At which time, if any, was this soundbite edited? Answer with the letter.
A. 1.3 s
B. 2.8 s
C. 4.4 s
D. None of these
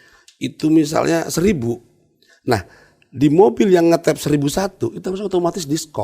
D